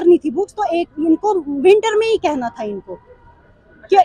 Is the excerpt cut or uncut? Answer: uncut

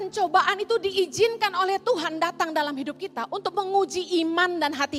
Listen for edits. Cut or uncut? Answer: uncut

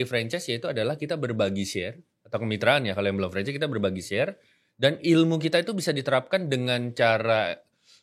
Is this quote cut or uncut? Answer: uncut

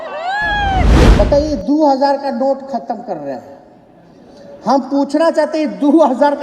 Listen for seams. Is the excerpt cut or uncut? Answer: cut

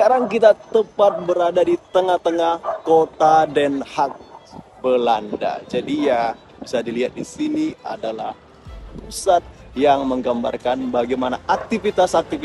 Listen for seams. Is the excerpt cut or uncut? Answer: uncut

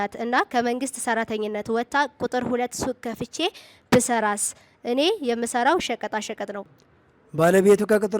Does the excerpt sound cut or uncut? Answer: cut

